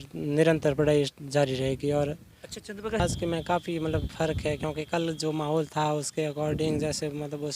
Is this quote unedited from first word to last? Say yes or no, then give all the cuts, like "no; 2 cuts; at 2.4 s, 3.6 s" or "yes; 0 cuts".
no; 1 cut; at 3.0 s